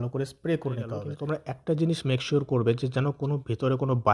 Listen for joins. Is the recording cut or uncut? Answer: cut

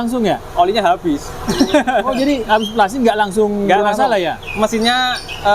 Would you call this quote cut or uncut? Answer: uncut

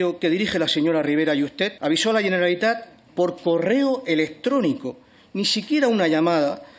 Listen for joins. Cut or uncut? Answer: cut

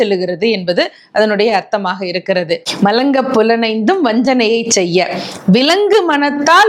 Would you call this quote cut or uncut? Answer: cut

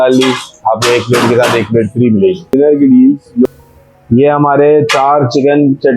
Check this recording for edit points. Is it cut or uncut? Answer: cut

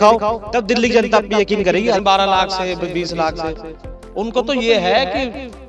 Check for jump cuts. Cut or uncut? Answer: cut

